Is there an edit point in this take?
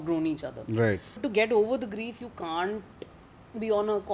yes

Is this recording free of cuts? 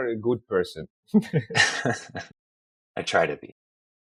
yes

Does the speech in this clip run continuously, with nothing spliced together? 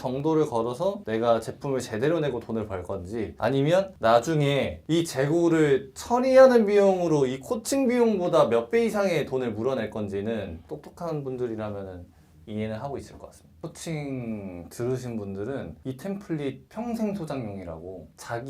no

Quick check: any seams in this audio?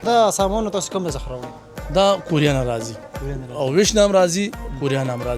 no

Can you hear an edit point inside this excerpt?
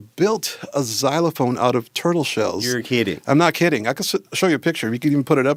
no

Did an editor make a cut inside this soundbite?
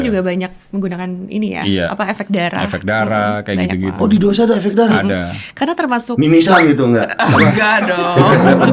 no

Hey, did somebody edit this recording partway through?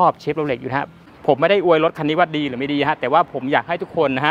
yes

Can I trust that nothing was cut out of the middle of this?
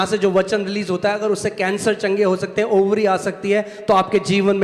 yes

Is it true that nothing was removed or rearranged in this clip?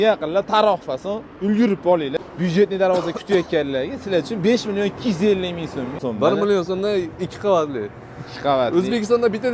no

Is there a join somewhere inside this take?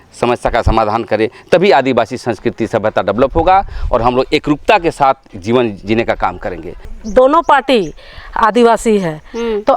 yes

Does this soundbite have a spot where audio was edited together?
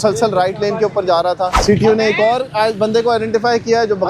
yes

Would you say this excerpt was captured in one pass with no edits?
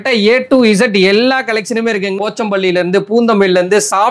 no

